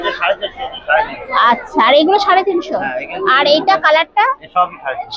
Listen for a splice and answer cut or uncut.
uncut